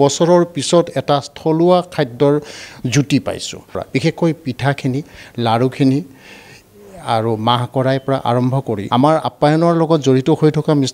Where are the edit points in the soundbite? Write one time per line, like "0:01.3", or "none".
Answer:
0:03.8
0:08.8